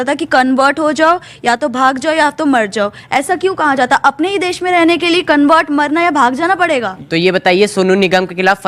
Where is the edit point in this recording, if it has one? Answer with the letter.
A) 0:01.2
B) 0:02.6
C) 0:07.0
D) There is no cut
C